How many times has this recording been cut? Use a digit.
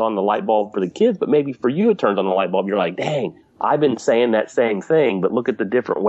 2